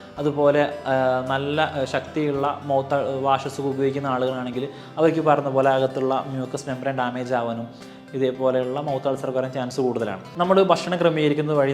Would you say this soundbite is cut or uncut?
cut